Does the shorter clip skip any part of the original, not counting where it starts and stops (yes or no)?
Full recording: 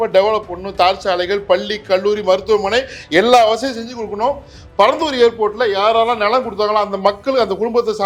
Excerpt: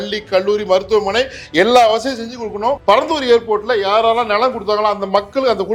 yes